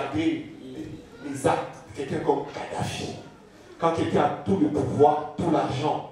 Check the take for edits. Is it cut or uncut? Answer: uncut